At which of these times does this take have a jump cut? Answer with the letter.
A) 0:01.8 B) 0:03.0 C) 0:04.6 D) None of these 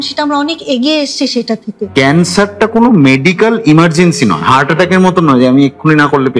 A